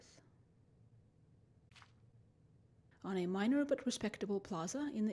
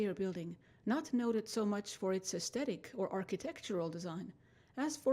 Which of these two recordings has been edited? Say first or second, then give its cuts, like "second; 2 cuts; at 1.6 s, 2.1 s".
second; 1 cut; at 4.1 s